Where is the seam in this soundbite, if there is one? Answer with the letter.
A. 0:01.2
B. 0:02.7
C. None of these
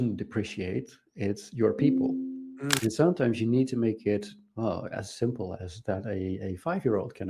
B